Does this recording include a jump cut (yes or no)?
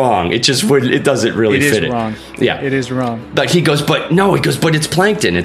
no